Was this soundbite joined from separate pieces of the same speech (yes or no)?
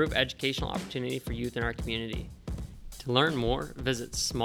yes